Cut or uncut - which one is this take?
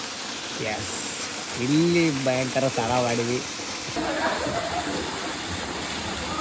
cut